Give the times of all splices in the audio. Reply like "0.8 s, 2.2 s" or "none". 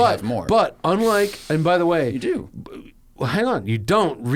none